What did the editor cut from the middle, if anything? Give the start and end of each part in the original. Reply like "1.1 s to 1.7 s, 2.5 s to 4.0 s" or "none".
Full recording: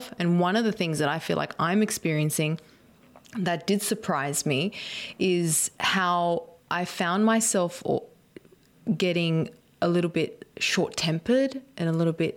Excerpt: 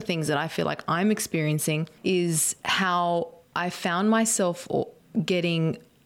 2.6 s to 5.1 s, 8.1 s to 8.7 s

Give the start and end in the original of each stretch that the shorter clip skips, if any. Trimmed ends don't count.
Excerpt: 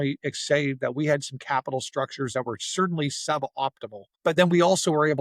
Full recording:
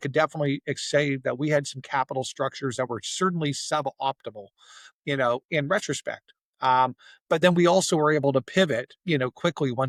4.5 s to 7.1 s

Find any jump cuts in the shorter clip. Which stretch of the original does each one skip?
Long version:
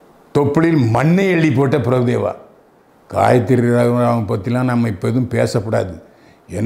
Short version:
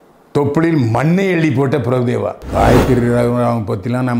2.4 s to 3.0 s

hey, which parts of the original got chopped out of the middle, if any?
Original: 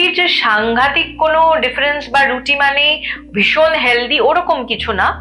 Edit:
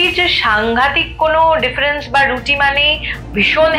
none

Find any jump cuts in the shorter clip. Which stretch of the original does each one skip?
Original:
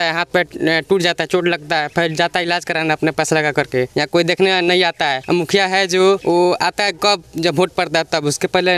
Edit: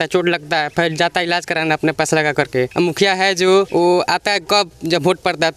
3.9 s to 5.2 s

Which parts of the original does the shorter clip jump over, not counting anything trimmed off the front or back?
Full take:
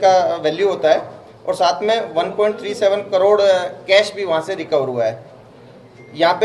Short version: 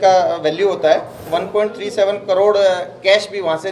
1.2 s to 2.1 s

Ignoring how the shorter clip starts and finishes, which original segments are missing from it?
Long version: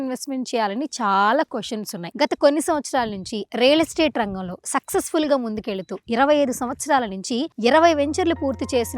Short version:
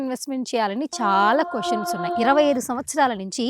2.0 s to 5.9 s

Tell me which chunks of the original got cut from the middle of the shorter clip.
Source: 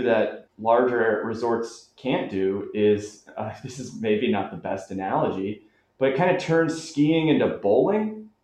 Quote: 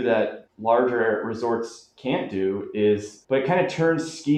3.1 s to 5.8 s

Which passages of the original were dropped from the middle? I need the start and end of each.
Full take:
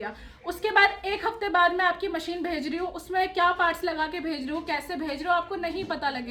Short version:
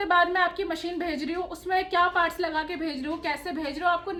none

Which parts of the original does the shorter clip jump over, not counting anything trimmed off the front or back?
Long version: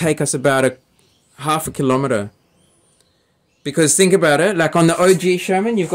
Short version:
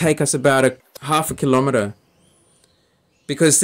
0.9 s to 1.3 s

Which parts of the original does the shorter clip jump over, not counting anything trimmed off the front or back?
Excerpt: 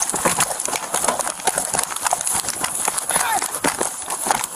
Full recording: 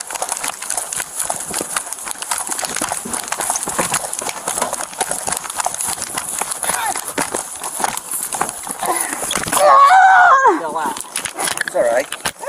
none

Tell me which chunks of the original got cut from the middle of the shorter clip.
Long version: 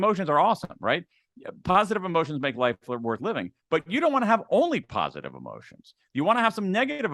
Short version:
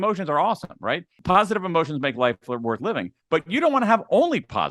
1.1 s to 1.5 s

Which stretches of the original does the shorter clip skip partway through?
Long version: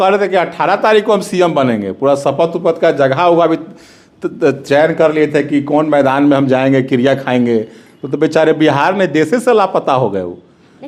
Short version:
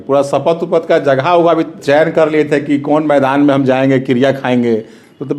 3.7 s to 4.6 s

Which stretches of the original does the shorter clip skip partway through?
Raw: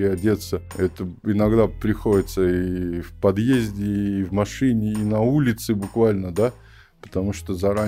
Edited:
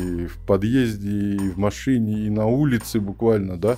none

